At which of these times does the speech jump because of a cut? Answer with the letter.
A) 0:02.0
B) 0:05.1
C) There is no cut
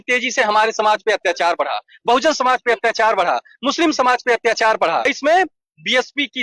B